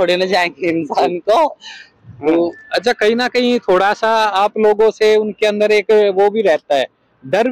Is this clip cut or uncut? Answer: uncut